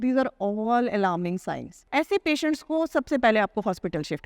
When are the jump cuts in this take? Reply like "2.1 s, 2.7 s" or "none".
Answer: 1.7 s